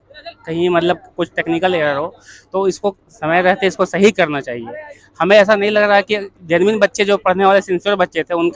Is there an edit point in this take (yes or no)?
no